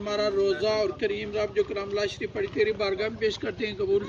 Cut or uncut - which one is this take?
uncut